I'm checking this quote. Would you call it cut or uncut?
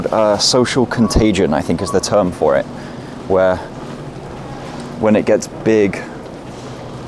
uncut